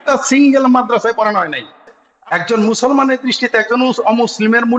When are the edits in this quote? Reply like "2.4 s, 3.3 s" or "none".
2.0 s